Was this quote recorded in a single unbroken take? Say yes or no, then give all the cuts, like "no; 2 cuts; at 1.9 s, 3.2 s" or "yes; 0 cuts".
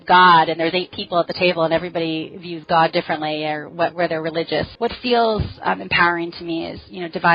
no; 1 cut; at 4.7 s